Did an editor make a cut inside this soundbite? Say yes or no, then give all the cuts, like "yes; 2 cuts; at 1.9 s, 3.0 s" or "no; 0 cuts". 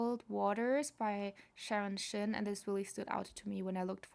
no; 0 cuts